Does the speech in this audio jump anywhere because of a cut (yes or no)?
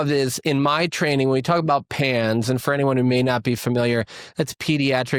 no